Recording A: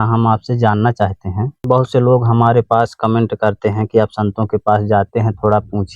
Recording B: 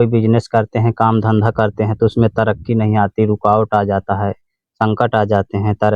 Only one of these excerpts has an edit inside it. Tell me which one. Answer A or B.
A